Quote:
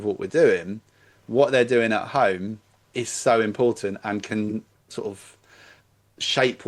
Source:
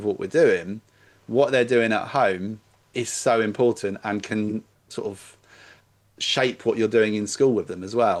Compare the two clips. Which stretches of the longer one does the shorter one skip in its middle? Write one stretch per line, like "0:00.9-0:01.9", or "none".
none